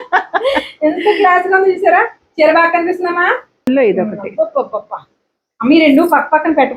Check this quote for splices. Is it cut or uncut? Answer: cut